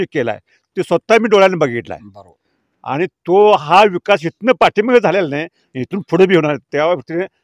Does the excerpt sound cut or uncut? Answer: uncut